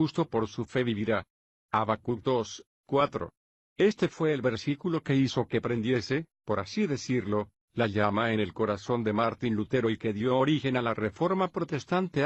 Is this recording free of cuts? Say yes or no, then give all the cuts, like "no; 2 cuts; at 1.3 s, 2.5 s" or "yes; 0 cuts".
no; 1 cut; at 7.4 s